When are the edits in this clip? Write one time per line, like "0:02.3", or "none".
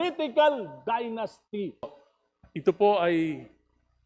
0:02.1